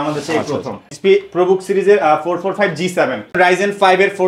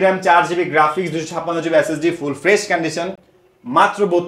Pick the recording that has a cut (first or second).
first